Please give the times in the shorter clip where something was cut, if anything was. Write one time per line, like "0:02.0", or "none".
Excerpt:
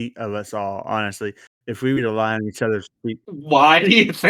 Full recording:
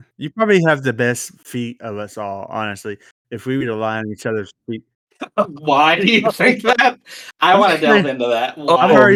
0:03.4